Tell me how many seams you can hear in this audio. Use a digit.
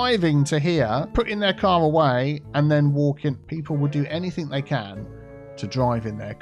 2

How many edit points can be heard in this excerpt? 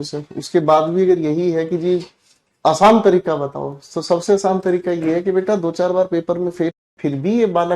1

